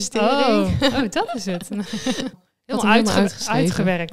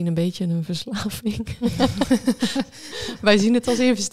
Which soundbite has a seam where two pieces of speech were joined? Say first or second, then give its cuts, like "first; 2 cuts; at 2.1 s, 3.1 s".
first; 1 cut; at 2.3 s